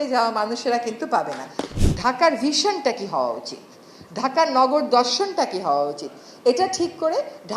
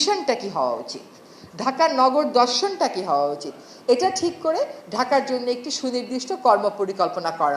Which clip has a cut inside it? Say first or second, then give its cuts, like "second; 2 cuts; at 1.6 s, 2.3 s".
first; 1 cut; at 1.6 s